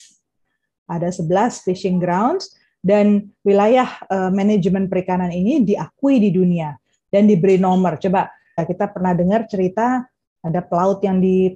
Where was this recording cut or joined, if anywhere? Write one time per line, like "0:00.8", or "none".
0:08.6